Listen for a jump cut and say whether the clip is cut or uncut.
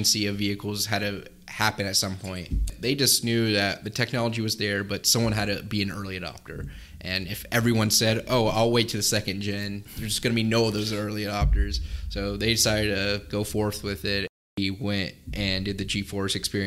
cut